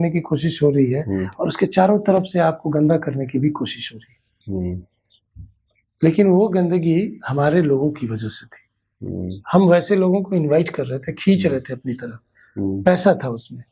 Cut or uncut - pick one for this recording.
uncut